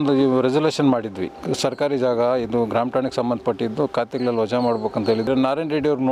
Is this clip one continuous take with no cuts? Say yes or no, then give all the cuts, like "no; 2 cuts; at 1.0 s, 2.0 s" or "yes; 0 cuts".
no; 2 cuts; at 1.4 s, 5.3 s